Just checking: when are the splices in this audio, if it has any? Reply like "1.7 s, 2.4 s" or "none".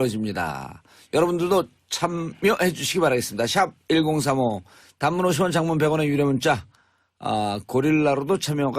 7.6 s